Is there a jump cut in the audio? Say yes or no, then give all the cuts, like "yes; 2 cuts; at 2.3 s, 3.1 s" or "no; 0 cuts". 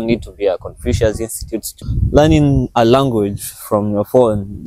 yes; 1 cut; at 1.7 s